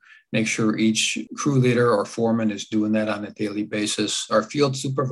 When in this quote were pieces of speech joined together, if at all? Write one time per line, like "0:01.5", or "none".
0:01.2
0:04.2